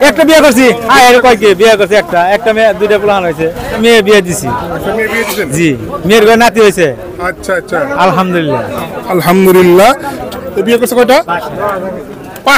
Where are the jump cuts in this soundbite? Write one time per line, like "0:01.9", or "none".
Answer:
0:03.7
0:10.2